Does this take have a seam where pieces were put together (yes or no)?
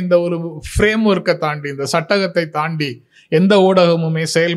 no